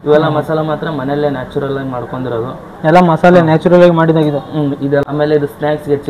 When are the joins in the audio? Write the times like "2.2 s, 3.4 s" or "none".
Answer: 5.0 s